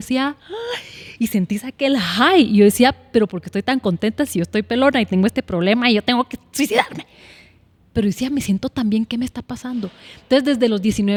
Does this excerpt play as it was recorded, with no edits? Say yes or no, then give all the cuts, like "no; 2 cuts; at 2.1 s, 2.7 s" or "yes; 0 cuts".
yes; 0 cuts